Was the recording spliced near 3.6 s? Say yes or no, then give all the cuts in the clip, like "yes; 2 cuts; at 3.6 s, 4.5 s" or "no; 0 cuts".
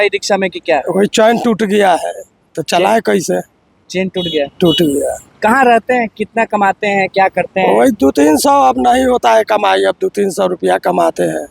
no; 0 cuts